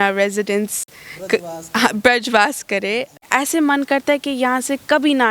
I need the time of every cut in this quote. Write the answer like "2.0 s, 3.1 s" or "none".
3.2 s